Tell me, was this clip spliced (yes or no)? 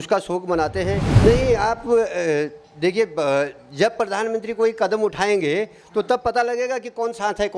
yes